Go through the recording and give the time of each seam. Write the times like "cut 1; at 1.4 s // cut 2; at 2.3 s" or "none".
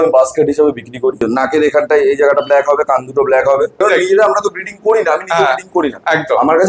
cut 1; at 1.2 s // cut 2; at 3.8 s